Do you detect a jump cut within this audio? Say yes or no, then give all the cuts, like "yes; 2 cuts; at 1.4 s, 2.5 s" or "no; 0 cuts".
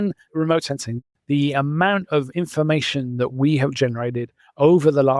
yes; 1 cut; at 1.1 s